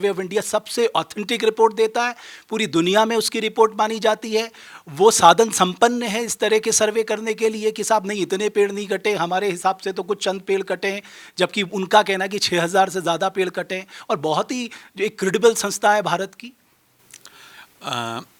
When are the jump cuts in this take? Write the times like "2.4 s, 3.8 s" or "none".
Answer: none

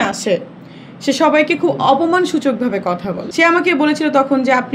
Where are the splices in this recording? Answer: 3.2 s

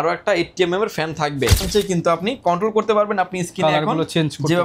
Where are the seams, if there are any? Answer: 1.7 s

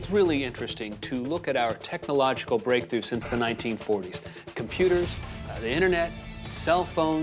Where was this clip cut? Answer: none

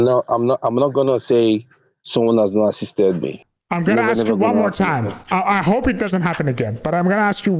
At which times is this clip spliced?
3.4 s

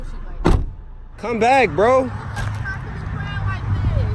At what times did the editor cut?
1.3 s

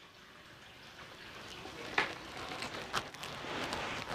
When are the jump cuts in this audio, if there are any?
none

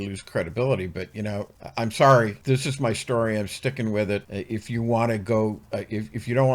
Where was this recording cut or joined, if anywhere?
1.6 s, 2.4 s, 4.3 s

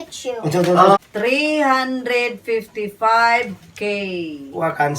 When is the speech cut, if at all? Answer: 1.0 s

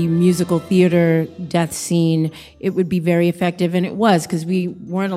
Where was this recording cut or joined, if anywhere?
none

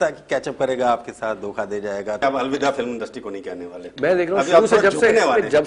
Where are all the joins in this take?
2.2 s

